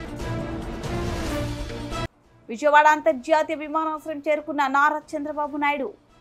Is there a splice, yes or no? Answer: no